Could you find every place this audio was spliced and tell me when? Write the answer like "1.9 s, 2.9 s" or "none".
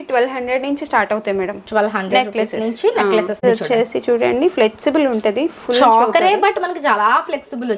3.4 s